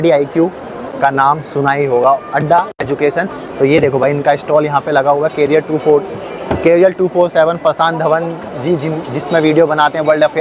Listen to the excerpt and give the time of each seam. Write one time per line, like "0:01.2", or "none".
none